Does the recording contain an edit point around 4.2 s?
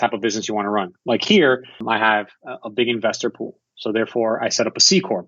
no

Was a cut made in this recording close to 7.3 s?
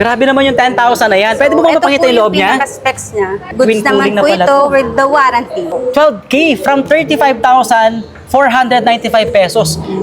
no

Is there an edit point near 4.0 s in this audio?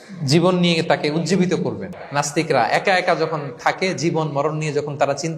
no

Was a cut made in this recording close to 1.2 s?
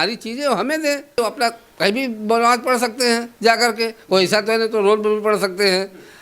yes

